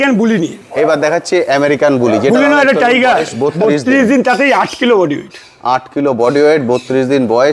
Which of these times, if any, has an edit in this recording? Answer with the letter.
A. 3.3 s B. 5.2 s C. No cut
A